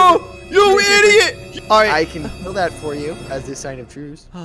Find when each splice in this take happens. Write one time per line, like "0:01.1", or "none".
0:01.4

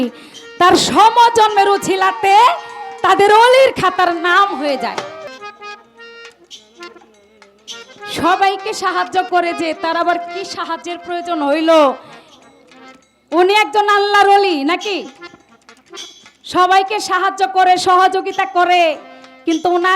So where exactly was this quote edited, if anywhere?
0:05.3

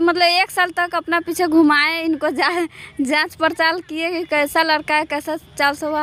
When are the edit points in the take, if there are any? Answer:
none

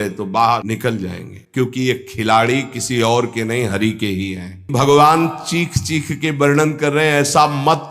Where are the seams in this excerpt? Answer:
0:01.2
0:04.7

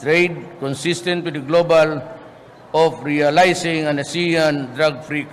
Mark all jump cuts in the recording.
none

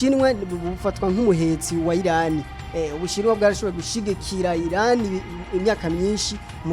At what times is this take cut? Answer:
0:02.6

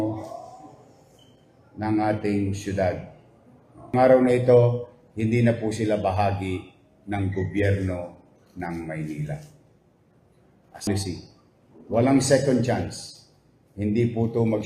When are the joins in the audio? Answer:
0:03.9
0:10.9

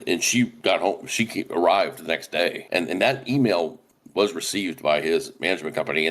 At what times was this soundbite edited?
0:02.6

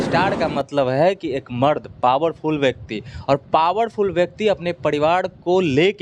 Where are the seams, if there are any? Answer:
none

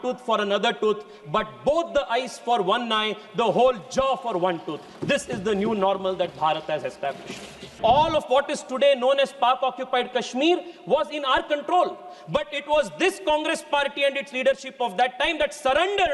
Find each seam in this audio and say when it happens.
0:07.8

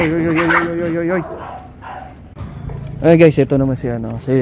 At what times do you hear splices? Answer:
0:02.4

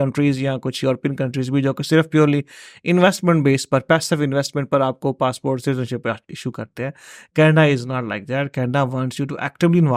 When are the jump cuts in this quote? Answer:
none

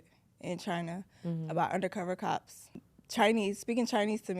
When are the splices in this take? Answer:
0:02.7

